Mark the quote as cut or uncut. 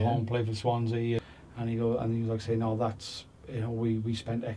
cut